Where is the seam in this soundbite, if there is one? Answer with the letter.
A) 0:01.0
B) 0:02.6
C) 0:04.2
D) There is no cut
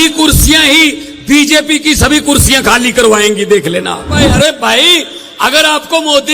C